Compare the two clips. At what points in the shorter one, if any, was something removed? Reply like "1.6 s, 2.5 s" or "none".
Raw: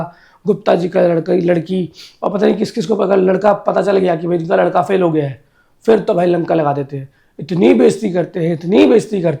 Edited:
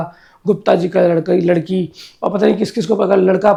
none